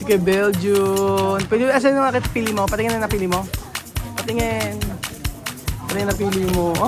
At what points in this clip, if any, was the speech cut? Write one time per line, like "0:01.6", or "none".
none